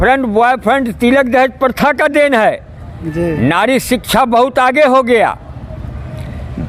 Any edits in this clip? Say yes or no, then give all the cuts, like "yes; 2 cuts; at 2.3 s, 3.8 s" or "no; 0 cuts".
no; 0 cuts